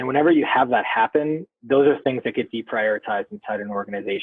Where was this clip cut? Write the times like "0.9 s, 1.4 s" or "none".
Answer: none